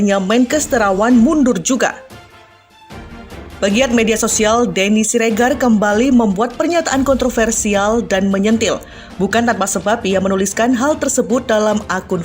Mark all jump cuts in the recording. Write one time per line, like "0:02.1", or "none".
0:02.0
0:03.4